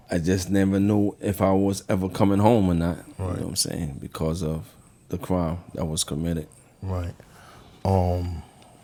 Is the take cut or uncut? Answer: uncut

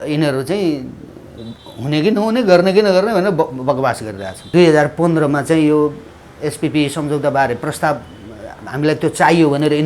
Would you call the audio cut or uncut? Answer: cut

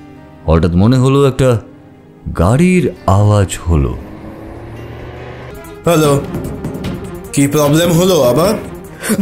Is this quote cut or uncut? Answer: cut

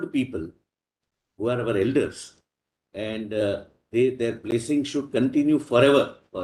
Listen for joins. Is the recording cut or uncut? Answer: uncut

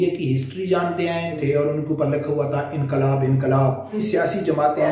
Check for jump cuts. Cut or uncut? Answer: cut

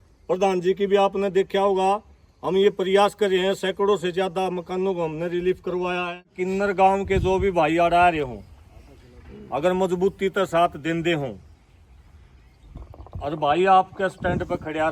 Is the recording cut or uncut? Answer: cut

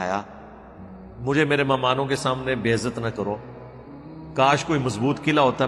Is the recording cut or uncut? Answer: uncut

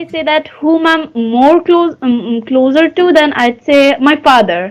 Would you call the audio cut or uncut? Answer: uncut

